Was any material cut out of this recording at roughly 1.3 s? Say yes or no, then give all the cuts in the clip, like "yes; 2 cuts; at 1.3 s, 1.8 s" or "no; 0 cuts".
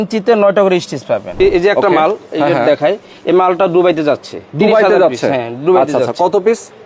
yes; 1 cut; at 1.3 s